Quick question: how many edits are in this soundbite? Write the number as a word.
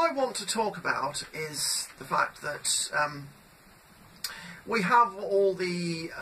zero